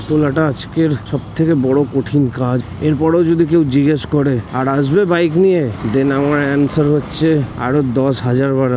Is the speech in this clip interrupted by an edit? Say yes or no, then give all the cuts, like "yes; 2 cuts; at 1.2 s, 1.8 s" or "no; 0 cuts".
yes; 5 cuts; at 1.1 s, 2.6 s, 4.5 s, 5.8 s, 7.5 s